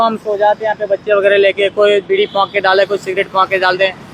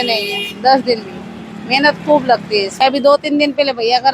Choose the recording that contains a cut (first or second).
second